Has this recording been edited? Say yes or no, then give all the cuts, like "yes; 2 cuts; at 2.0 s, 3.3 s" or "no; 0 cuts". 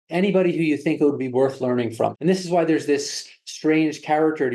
yes; 1 cut; at 2.1 s